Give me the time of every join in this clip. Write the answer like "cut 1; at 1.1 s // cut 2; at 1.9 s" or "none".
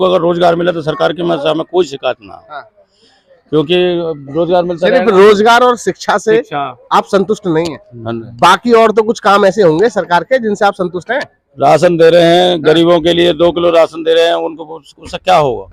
none

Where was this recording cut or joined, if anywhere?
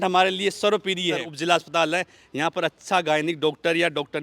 cut 1; at 1.3 s

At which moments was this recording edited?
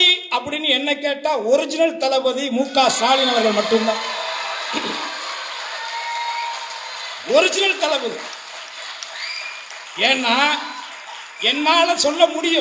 none

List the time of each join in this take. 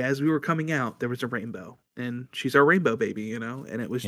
none

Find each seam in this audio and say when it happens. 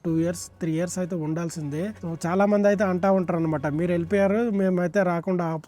cut 1; at 2.0 s

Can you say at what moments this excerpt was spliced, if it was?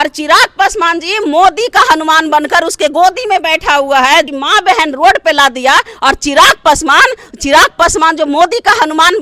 cut 1; at 4.3 s

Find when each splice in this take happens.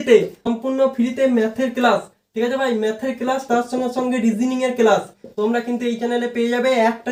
none

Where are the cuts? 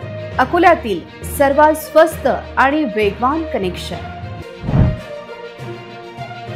none

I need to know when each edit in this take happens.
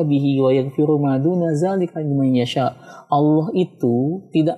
none

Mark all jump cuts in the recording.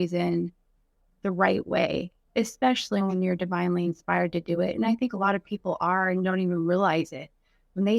cut 1; at 2.2 s

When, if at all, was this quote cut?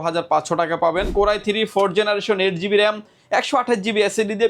cut 1; at 1.1 s

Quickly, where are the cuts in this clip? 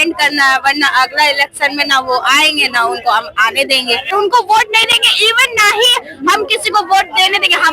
cut 1; at 4.1 s

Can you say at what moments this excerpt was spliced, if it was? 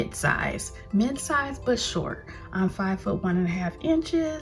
none

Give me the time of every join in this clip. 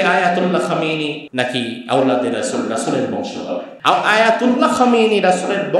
cut 1; at 1.2 s // cut 2; at 3.7 s

